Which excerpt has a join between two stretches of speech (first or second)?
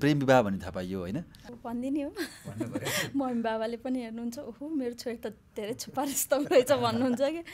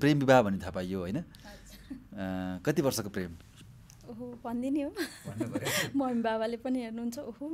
first